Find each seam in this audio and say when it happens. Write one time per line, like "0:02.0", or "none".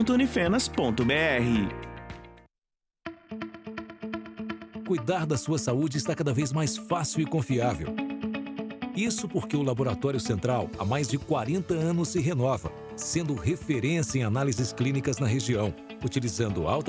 0:02.9